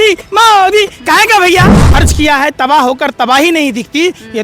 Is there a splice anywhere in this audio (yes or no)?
yes